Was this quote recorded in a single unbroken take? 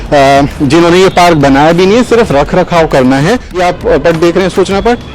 no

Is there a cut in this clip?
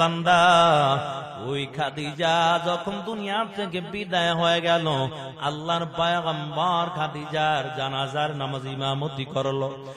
no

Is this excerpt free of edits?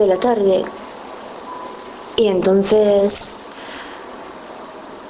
yes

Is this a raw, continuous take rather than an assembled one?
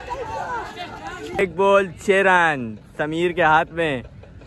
no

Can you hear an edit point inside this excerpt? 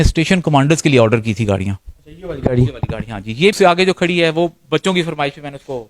yes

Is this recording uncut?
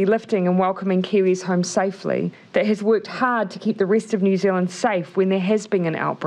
no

